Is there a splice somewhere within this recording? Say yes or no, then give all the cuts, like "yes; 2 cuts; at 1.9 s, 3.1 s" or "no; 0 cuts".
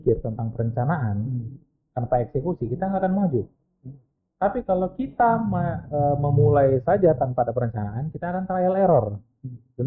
no; 0 cuts